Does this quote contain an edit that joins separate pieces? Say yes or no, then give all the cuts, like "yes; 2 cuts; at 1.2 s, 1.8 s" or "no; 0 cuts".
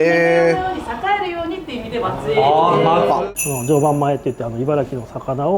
yes; 1 cut; at 3.2 s